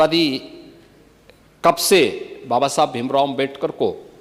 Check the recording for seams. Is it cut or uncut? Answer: uncut